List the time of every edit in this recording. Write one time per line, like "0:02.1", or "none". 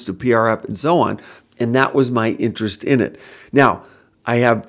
none

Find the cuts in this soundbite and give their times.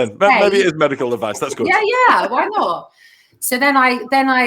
none

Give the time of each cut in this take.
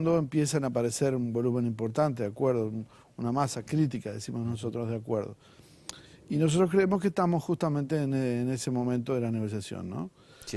0:06.5

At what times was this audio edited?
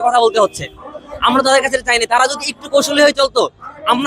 none

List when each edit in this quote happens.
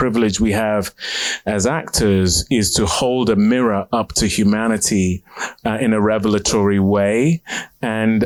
none

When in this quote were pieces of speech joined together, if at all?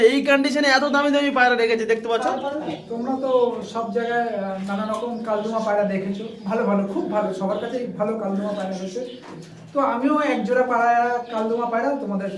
0:02.7
0:09.3

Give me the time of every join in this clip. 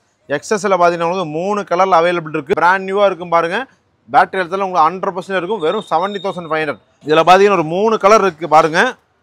0:02.5
0:06.9

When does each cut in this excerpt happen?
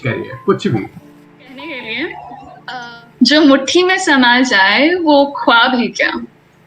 0:01.7

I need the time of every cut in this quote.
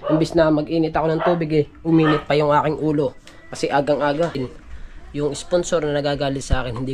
0:04.5

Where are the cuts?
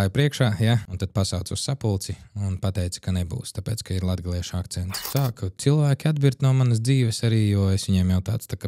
0:00.9
0:04.9

